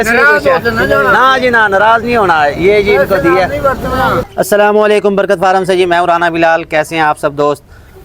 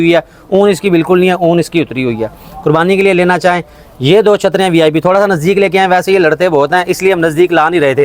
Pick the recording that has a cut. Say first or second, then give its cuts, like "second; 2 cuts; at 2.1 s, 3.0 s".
first; 1 cut; at 4.2 s